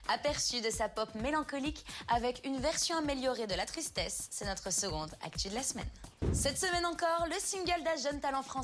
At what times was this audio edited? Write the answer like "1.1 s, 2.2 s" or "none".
6.8 s